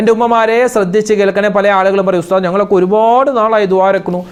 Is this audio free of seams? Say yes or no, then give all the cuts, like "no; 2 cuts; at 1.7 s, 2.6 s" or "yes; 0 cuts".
yes; 0 cuts